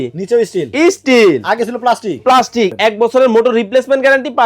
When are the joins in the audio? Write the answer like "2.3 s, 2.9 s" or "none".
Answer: 2.7 s

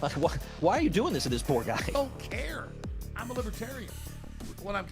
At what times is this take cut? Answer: 1.9 s

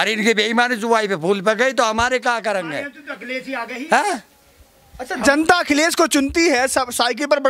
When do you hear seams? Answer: none

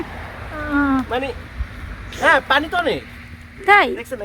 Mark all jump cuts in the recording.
none

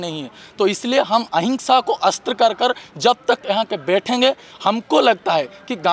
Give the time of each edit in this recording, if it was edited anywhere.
none

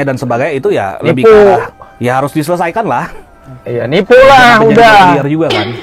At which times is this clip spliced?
none

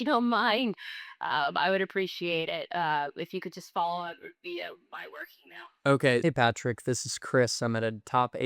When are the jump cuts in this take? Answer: 6.2 s

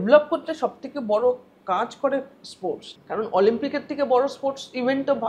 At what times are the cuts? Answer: 2.9 s

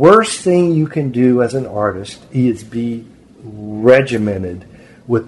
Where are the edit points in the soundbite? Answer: none

